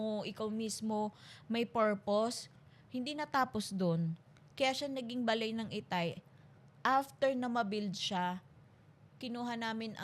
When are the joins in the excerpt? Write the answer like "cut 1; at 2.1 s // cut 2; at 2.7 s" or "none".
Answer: none